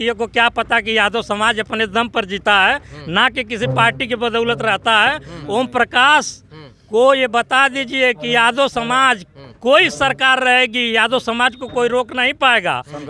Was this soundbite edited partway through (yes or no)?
no